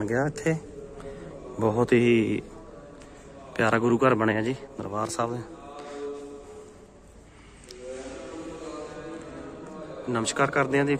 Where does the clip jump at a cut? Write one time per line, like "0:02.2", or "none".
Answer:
none